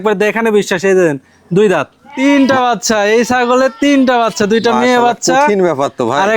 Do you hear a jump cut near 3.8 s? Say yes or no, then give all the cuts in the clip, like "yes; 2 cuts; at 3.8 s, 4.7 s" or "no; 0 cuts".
no; 1 cut; at 2.1 s